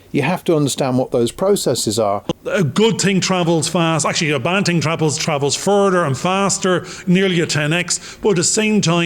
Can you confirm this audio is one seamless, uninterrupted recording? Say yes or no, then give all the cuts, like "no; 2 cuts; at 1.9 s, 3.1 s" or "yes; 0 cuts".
no; 1 cut; at 2.3 s